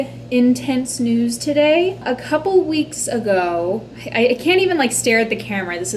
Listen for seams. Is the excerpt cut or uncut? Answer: uncut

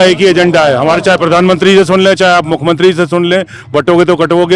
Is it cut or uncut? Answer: uncut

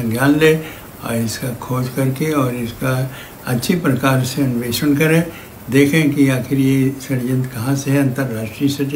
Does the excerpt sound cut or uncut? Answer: uncut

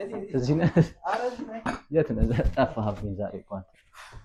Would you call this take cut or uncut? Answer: uncut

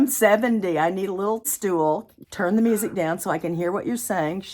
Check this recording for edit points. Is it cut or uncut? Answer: cut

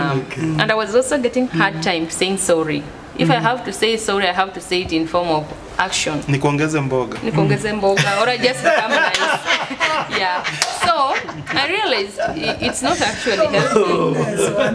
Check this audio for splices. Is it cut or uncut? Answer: cut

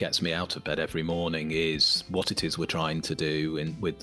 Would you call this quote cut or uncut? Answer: cut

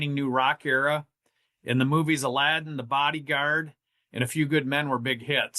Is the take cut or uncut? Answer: uncut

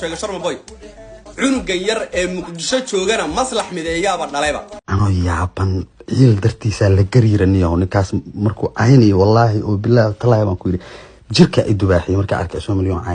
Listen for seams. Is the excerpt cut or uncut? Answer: cut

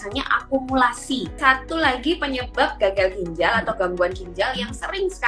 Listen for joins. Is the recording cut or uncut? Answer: cut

